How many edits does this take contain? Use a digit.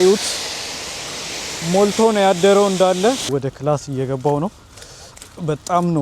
1